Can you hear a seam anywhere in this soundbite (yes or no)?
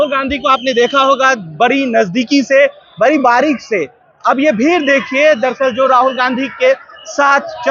no